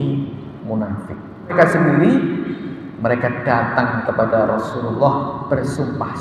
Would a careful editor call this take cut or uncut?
cut